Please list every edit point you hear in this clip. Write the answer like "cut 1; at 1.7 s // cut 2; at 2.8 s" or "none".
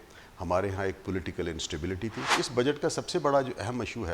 cut 1; at 2.3 s